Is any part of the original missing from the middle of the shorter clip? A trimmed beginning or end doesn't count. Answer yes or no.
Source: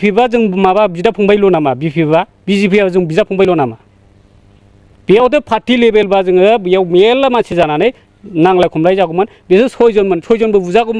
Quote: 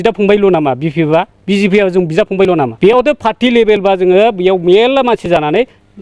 yes